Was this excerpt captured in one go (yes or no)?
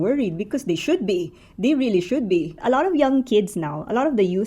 no